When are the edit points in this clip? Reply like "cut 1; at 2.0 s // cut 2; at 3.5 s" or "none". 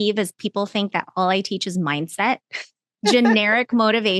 cut 1; at 2.9 s